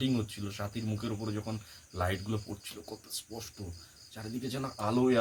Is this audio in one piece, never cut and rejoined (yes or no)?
yes